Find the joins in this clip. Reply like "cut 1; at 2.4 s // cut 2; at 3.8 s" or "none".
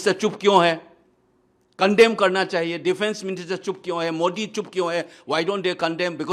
none